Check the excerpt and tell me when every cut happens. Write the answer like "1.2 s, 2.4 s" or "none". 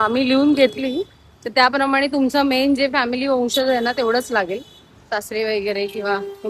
none